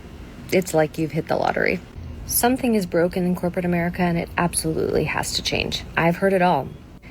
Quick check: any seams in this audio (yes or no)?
yes